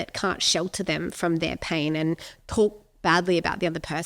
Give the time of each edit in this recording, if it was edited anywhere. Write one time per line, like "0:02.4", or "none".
none